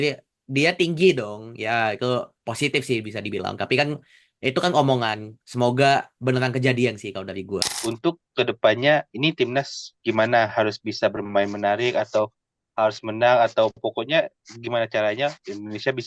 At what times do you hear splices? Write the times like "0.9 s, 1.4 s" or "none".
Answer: 7.7 s